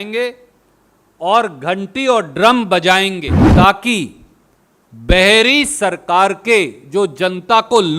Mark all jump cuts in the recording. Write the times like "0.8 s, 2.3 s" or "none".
3.4 s